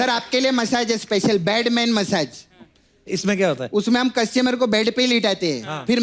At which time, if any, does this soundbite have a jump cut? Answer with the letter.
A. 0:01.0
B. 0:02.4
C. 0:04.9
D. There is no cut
D